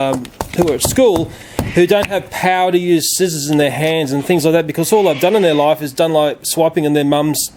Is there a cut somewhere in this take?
no; 0 cuts

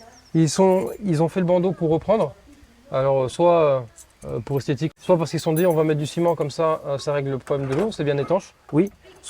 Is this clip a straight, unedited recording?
no; 1 cut; at 4.9 s

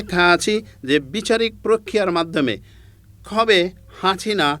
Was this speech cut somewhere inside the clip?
no; 0 cuts

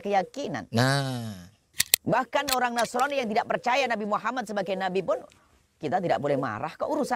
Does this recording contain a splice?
no; 0 cuts

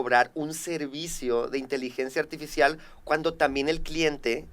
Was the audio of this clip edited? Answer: no; 0 cuts

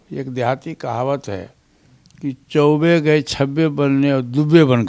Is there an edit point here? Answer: no; 0 cuts

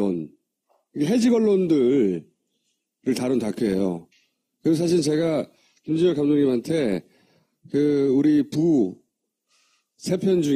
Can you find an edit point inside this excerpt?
no; 0 cuts

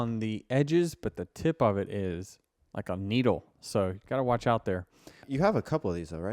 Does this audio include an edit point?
yes; 1 cut; at 5.3 s

